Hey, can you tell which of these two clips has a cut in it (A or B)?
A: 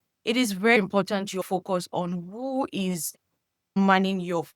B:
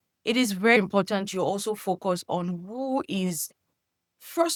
A